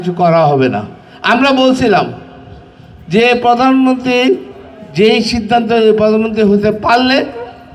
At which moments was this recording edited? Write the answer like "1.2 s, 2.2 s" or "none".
none